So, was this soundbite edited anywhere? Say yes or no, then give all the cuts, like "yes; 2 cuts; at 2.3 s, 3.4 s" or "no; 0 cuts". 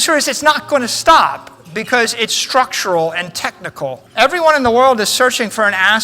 yes; 1 cut; at 4.0 s